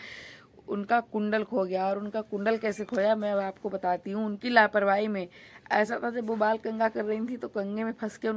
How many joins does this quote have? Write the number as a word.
zero